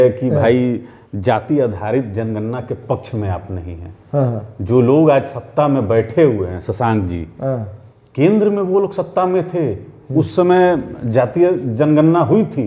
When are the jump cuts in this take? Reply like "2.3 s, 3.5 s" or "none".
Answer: none